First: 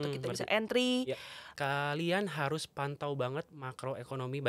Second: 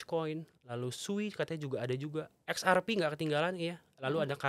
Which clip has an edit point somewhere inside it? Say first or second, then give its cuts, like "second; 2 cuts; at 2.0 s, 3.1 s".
first; 1 cut; at 1.4 s